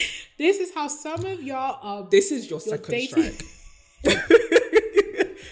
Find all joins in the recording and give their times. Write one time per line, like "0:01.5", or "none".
none

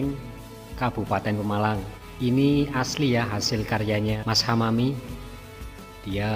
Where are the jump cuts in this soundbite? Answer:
0:02.0
0:04.2

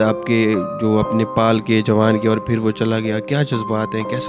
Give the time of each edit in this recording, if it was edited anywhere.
none

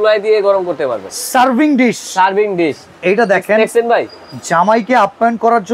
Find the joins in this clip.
0:01.0

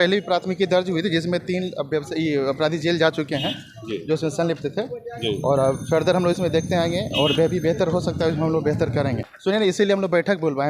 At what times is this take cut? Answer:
0:09.3

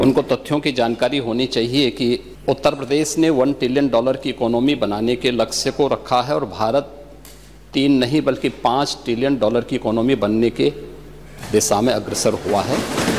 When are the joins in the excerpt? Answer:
0:02.3

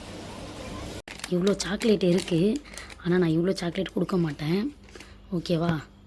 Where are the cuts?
0:01.0

